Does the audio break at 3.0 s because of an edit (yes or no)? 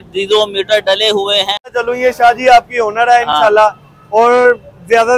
no